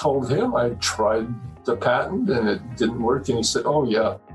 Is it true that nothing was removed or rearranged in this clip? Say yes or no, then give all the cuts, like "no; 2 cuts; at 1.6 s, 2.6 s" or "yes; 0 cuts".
yes; 0 cuts